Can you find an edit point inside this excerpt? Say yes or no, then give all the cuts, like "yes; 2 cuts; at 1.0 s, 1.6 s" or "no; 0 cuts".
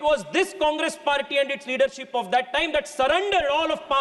no; 0 cuts